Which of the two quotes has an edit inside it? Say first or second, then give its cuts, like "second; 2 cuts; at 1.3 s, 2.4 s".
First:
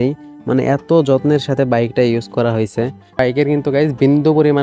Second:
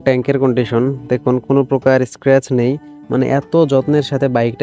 first; 1 cut; at 3.2 s